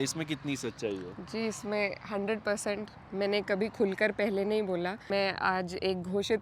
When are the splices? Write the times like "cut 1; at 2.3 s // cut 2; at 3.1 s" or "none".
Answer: cut 1; at 5.0 s